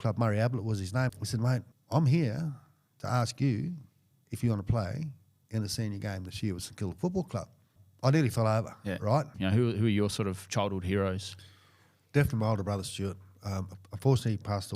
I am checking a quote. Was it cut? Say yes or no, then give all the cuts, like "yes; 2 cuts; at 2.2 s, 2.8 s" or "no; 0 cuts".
yes; 3 cuts; at 1.3 s, 7.8 s, 9.3 s